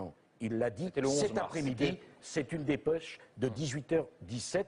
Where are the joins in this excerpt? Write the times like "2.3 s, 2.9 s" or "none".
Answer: none